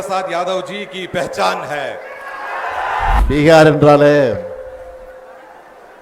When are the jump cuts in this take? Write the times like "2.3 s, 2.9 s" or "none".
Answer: 3.2 s